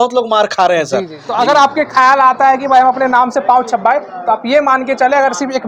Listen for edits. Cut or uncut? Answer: cut